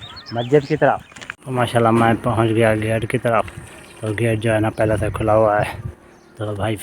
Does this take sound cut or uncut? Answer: cut